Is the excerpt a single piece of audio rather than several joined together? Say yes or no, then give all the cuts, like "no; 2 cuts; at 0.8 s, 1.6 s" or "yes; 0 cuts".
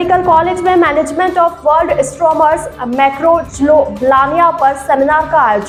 yes; 0 cuts